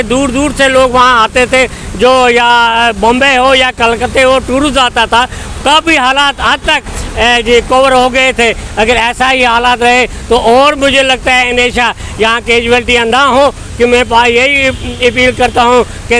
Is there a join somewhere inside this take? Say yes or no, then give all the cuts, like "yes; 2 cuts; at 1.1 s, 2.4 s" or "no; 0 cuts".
no; 0 cuts